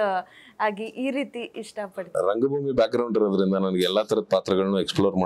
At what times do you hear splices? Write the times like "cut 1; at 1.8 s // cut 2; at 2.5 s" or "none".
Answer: none

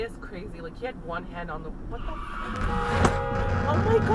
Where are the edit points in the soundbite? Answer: none

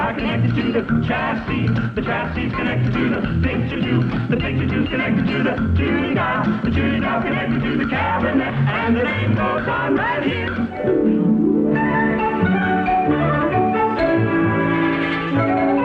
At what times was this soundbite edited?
none

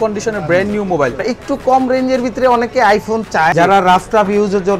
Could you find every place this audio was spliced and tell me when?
cut 1; at 1.2 s // cut 2; at 3.5 s

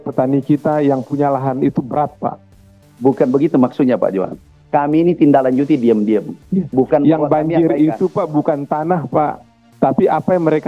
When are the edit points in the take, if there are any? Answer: cut 1; at 2.8 s

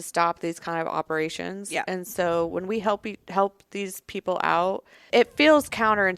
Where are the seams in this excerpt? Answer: cut 1; at 4.9 s

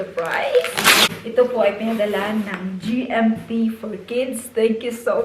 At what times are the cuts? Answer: cut 1; at 1.1 s

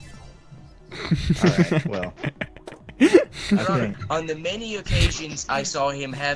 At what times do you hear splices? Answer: cut 1; at 4.0 s

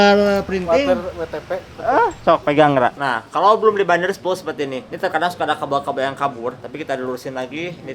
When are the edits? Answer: cut 1; at 3.0 s // cut 2; at 4.8 s // cut 3; at 6.6 s

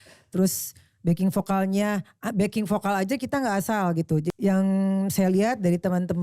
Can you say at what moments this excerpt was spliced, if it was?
cut 1; at 4.3 s

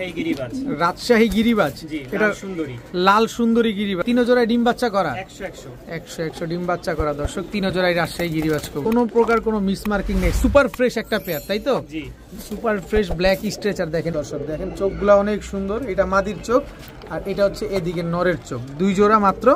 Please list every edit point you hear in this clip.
cut 1; at 4.0 s // cut 2; at 8.8 s // cut 3; at 14.1 s

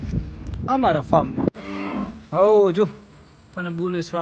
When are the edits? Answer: cut 1; at 1.6 s

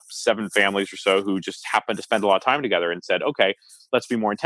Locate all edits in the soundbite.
none

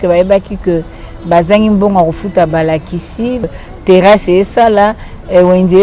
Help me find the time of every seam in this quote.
cut 1; at 3.4 s

